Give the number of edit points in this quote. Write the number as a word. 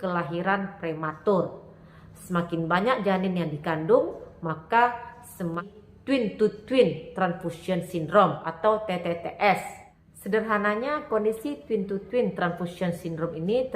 one